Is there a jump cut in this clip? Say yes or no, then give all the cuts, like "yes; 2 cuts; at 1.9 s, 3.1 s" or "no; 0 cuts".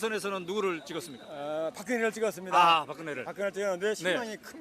yes; 1 cut; at 2.1 s